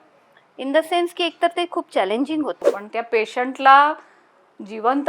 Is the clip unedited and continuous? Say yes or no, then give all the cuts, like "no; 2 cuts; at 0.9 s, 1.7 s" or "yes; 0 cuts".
no; 1 cut; at 2.7 s